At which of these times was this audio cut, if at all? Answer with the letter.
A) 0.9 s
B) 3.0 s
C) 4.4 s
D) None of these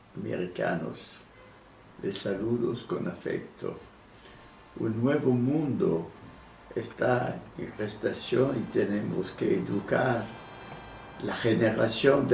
D